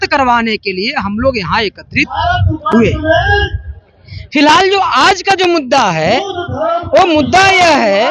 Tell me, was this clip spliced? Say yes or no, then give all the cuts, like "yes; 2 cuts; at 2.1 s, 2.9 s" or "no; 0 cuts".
no; 0 cuts